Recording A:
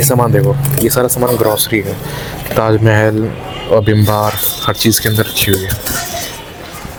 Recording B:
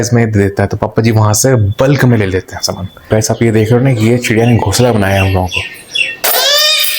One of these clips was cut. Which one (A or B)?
B